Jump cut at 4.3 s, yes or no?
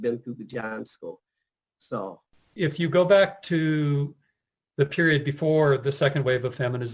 no